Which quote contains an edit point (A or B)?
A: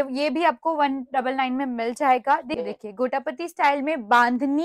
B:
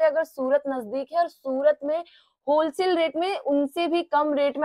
A